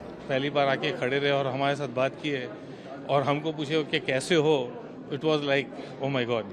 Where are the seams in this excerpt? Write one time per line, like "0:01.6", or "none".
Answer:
none